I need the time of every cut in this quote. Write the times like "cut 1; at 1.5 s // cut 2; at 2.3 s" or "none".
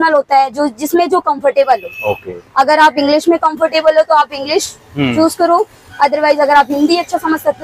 none